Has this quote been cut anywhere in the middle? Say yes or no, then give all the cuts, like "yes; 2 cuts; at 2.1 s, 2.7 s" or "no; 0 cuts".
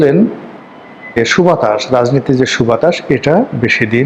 yes; 1 cut; at 1.2 s